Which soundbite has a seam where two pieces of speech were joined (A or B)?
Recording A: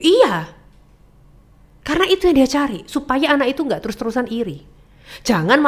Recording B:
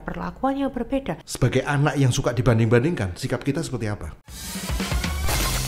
B